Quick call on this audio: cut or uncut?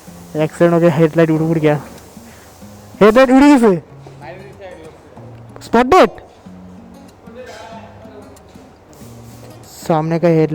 cut